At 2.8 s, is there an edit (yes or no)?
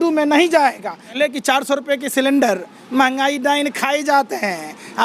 no